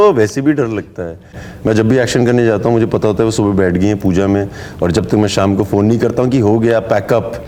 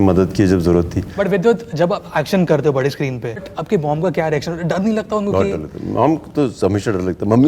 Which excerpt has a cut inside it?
second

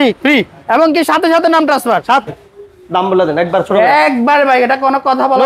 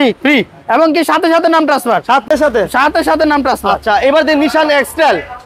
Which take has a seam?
first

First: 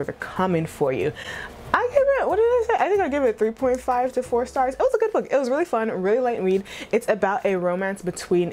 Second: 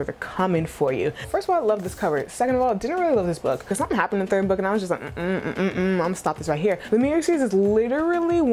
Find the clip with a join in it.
second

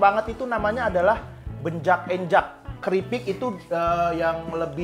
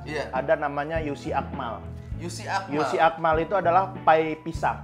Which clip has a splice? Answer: first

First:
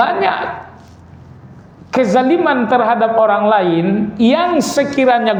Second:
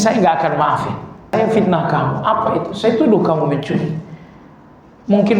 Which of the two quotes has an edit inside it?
second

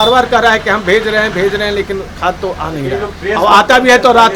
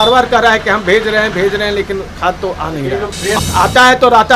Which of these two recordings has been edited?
second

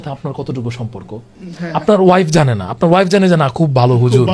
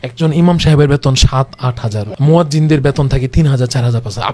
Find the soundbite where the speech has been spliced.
second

